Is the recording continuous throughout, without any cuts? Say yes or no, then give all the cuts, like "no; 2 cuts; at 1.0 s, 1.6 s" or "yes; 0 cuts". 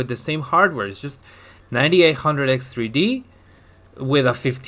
yes; 0 cuts